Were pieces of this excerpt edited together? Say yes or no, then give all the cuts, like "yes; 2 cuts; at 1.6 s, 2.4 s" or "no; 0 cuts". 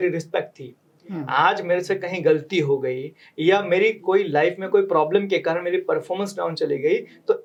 no; 0 cuts